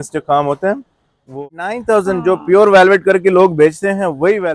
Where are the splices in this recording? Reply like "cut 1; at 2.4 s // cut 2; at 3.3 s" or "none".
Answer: cut 1; at 1.4 s